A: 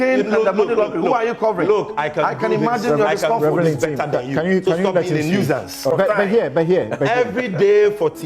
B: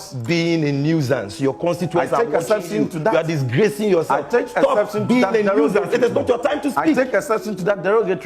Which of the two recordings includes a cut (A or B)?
A